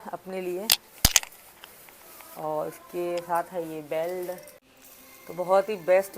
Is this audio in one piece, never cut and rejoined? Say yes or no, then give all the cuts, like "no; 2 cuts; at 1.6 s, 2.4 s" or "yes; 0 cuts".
yes; 0 cuts